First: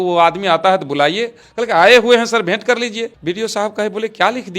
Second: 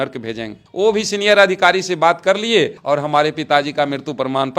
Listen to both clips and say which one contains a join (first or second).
first